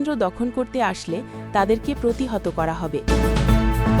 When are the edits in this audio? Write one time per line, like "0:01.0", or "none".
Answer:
0:03.0